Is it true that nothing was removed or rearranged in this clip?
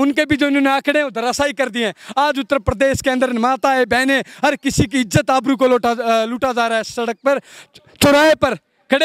yes; 0 cuts

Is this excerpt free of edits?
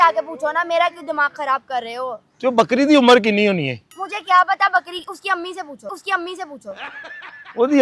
yes; 0 cuts

